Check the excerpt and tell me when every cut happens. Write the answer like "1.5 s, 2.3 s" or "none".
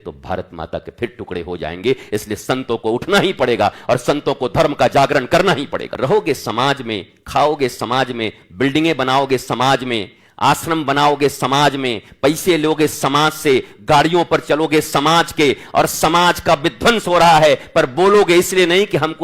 5.8 s